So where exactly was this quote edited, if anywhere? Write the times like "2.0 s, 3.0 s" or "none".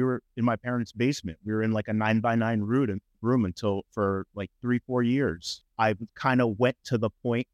5.5 s